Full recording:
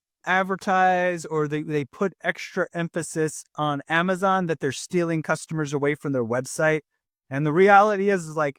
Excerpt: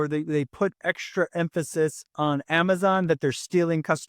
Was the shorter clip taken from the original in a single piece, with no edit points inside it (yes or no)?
yes